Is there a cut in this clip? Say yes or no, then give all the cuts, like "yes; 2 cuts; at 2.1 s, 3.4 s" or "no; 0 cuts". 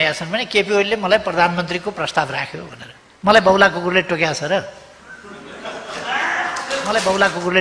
no; 0 cuts